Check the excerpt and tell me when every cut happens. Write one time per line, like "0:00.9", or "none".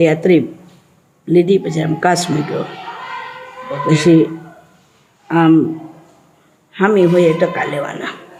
none

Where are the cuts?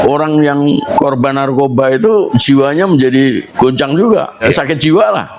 0:00.9
0:02.3
0:03.5
0:04.5

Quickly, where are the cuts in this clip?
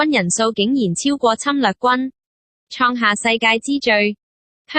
0:01.9

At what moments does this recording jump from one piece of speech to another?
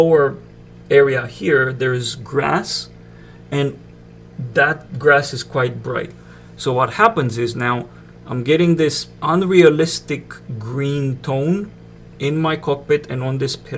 0:09.2

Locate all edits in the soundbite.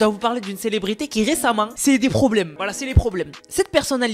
none

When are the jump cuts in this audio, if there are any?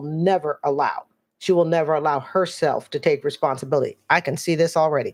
none

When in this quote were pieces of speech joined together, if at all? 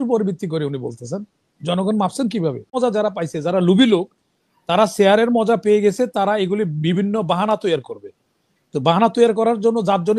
0:02.8

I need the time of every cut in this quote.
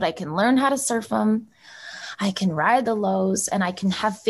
0:02.8

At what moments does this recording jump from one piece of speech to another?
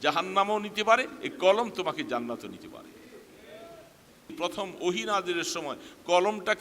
0:04.3

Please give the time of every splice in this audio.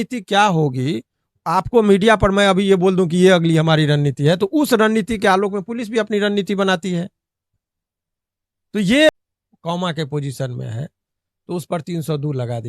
0:09.1

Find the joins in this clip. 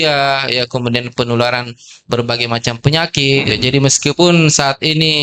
0:03.6

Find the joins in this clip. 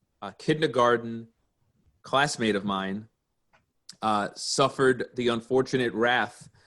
0:03.3

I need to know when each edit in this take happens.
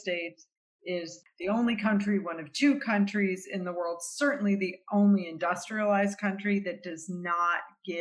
0:01.2

